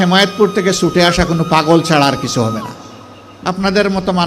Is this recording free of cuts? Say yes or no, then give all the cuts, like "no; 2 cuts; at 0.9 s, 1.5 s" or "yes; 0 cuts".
no; 1 cut; at 3.3 s